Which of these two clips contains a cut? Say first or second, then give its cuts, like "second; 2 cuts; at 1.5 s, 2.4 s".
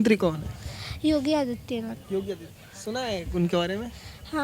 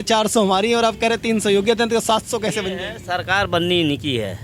first; 1 cut; at 2.4 s